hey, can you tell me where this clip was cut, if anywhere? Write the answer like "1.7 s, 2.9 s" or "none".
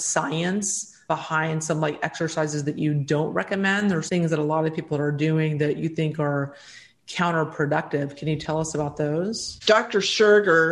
1.0 s, 4.0 s, 9.5 s